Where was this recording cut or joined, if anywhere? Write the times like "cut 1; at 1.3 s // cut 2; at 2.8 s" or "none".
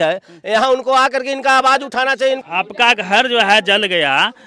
cut 1; at 2.4 s